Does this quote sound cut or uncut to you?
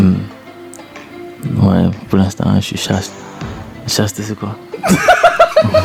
uncut